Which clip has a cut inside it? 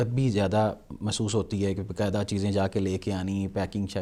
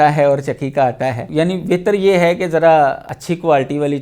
second; 2 cuts; at 1.2 s, 3.1 s

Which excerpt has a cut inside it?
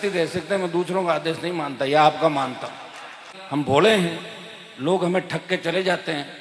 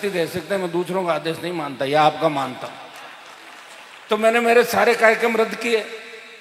first; 1 cut; at 3.3 s

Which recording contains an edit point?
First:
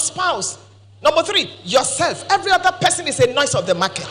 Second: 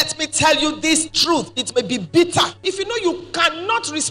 second; 1 cut; at 2.6 s

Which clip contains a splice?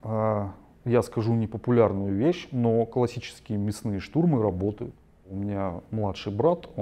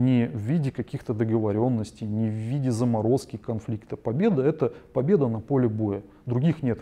first; 1 cut; at 5.3 s

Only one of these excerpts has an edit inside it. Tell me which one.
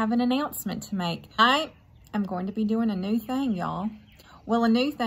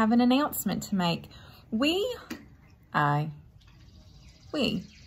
first; 1 cut; at 1.4 s

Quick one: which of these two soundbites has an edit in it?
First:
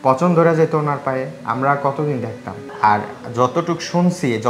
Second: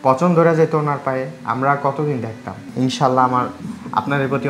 second; 1 cut; at 2.6 s

